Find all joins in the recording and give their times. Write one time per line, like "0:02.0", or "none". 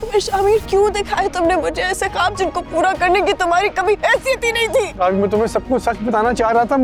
none